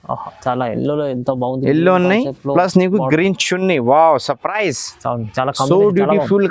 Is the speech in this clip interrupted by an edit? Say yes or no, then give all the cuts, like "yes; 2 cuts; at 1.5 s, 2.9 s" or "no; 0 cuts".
no; 0 cuts